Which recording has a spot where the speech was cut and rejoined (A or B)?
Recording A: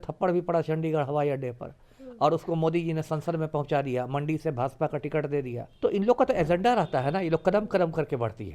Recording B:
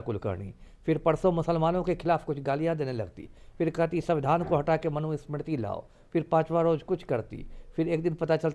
A